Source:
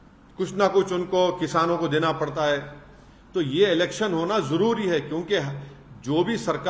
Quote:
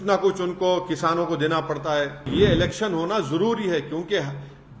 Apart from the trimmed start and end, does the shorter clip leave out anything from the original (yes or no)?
yes